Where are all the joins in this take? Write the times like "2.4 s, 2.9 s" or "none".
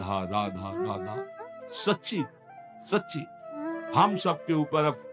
none